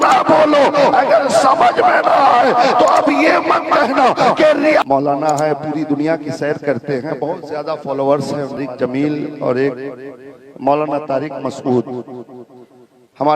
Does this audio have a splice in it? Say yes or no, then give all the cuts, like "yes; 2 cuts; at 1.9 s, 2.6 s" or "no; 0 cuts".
yes; 2 cuts; at 4.8 s, 8.6 s